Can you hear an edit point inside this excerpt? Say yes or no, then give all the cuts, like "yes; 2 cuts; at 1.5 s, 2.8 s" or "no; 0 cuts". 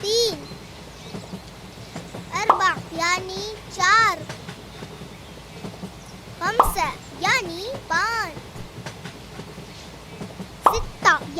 yes; 4 cuts; at 4.2 s, 6.4 s, 8.3 s, 10.0 s